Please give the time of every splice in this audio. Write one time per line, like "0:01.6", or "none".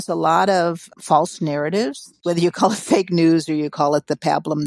0:00.9
0:02.1